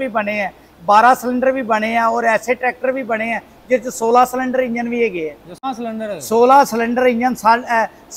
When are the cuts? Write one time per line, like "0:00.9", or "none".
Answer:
0:05.6